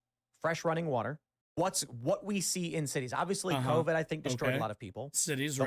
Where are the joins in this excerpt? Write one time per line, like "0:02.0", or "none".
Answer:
none